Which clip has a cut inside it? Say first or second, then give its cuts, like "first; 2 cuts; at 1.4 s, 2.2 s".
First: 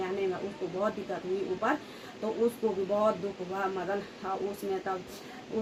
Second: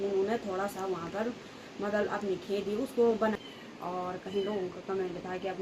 second; 1 cut; at 3.4 s